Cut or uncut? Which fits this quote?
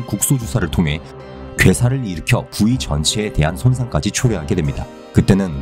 cut